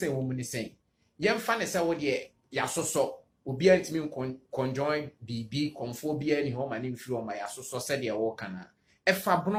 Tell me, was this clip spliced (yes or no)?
no